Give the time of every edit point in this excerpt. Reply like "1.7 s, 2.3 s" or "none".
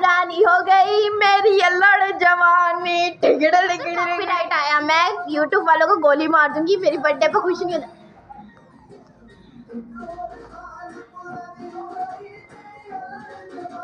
4.1 s